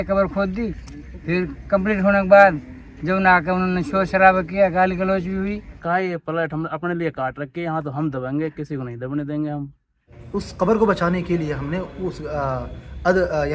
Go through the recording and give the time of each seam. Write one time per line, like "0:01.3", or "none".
0:05.8
0:10.1